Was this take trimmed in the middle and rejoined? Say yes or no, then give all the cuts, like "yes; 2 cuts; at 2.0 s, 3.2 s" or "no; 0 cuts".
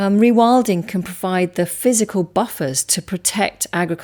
no; 0 cuts